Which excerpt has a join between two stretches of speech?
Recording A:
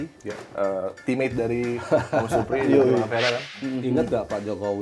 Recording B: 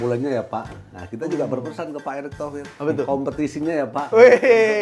A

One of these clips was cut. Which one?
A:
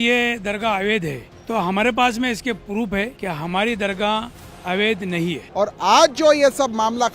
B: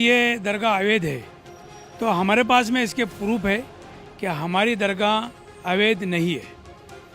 A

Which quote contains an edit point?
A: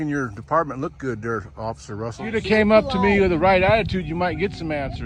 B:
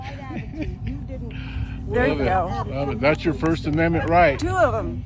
A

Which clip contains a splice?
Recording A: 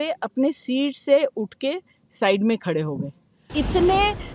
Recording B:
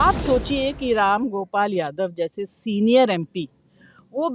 A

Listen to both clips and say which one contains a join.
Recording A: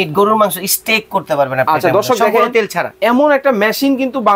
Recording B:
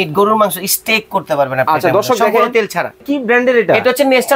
B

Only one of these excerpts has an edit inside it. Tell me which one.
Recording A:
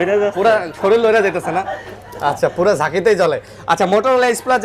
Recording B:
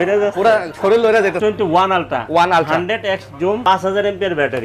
B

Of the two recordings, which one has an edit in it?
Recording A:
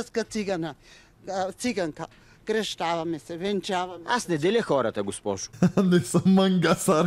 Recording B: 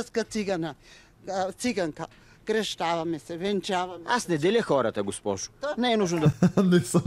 A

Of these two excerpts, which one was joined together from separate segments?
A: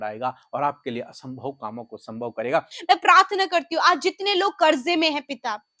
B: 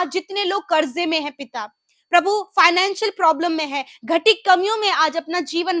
A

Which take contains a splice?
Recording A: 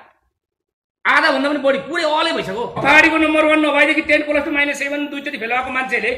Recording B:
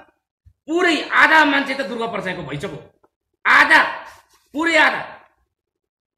A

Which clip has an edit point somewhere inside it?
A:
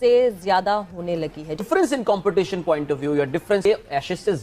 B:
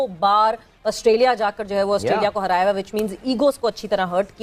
A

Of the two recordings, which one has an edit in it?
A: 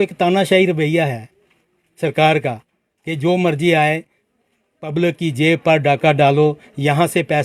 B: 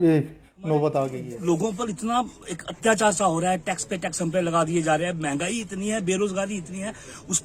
B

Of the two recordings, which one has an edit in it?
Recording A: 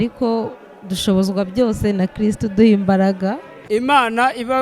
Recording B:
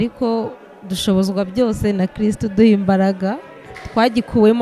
A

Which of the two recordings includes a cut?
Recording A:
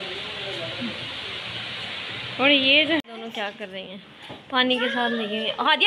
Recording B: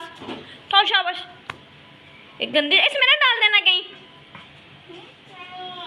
A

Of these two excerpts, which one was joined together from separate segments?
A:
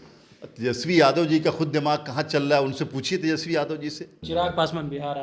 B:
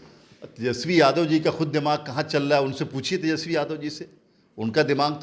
A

